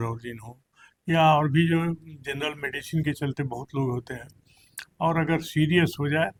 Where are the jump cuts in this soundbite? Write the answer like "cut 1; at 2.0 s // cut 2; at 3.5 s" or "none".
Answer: none